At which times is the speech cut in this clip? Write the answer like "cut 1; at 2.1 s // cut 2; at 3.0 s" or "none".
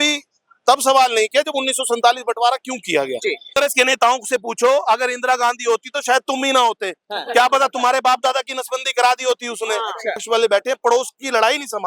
cut 1; at 3.5 s // cut 2; at 10.2 s